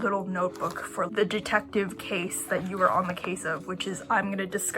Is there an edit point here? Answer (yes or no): yes